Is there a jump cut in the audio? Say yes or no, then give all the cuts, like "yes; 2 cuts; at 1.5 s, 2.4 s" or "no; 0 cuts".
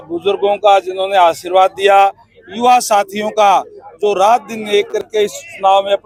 no; 0 cuts